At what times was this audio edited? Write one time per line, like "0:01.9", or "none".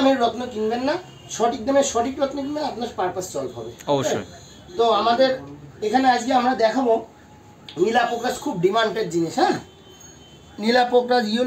none

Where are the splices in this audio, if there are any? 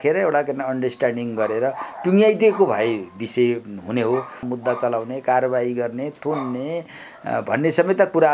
0:04.5

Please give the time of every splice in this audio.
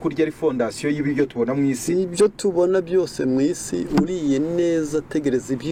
none

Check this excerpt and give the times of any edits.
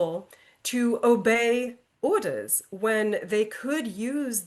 none

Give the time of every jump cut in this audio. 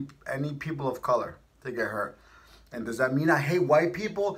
none

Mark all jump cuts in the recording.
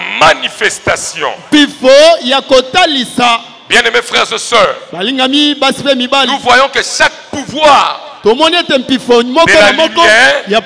none

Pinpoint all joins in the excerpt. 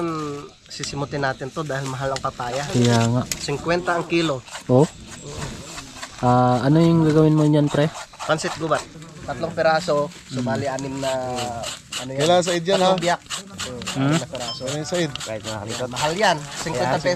0:08.9

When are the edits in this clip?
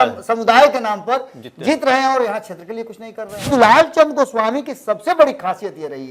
0:03.5

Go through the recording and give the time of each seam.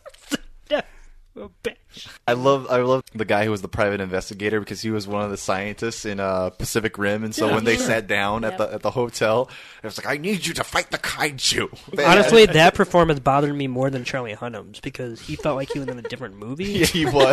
0:02.1
0:03.1
0:11.9

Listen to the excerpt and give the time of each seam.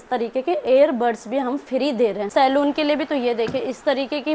0:02.3

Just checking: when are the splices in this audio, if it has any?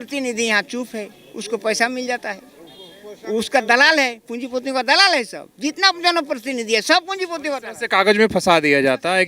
none

